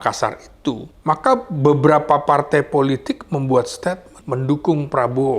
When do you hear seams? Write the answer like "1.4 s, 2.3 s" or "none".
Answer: 0.9 s, 4.1 s

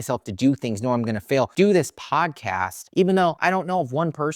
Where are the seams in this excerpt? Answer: 1.5 s

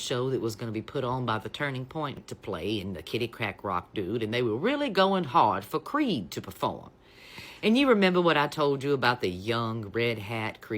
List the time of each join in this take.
2.2 s

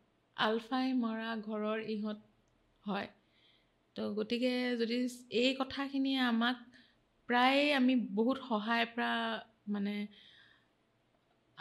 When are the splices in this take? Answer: none

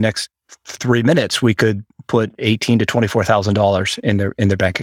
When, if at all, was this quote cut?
2.3 s

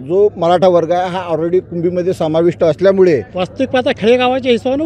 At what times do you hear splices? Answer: 3.4 s

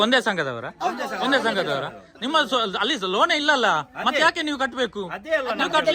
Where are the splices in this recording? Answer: none

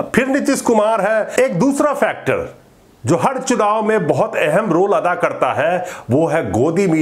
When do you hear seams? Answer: 1.4 s

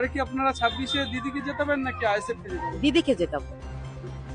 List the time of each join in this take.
none

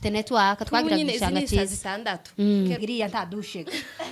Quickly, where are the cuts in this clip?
2.8 s

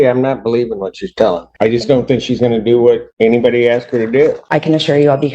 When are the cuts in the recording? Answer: 1.5 s, 3.1 s, 4.4 s

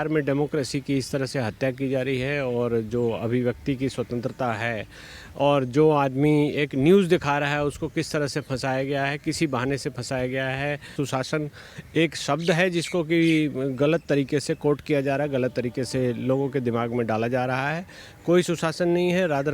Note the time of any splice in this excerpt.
10.9 s

